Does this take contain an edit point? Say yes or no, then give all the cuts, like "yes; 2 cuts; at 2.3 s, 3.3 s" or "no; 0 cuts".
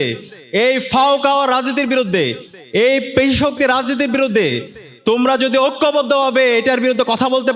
no; 0 cuts